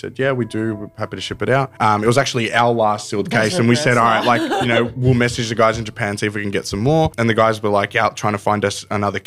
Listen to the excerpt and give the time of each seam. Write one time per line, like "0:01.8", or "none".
0:01.7
0:07.1